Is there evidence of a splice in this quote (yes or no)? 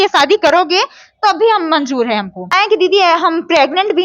yes